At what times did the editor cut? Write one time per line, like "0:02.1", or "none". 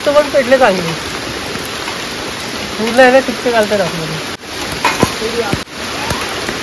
0:04.4
0:05.6